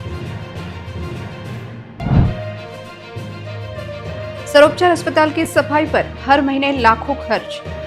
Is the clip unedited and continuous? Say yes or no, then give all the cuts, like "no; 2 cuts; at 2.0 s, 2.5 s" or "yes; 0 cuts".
no; 1 cut; at 1.4 s